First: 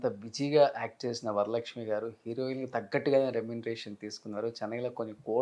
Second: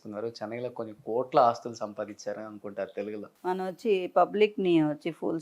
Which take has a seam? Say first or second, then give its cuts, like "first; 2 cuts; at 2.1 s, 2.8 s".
second; 1 cut; at 3.3 s